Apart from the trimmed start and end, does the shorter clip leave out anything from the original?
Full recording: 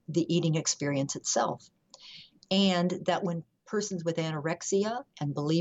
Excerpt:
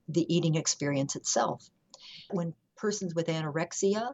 yes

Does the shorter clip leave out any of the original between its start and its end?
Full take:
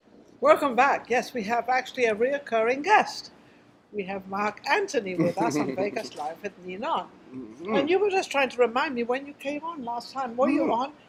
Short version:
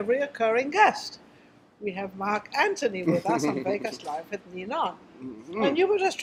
no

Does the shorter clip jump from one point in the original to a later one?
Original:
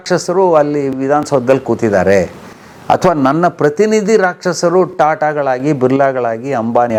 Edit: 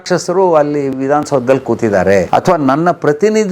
yes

